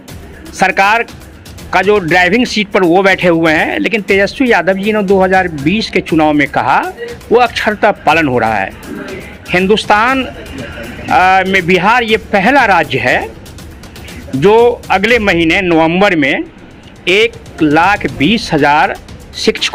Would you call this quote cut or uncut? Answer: uncut